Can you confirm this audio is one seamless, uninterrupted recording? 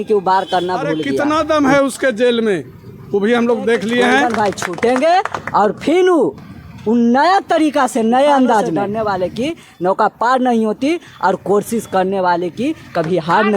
no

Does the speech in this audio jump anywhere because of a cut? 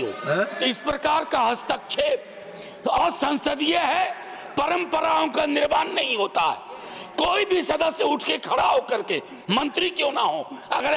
no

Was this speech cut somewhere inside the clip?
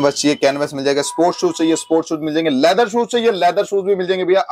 no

